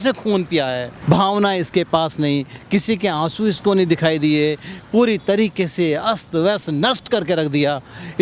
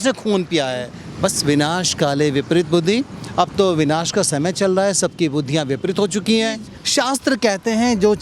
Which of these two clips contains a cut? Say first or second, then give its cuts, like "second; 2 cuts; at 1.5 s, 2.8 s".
second; 2 cuts; at 0.9 s, 6.7 s